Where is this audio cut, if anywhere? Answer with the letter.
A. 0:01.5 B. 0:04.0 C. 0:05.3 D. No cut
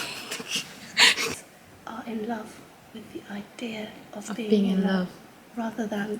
A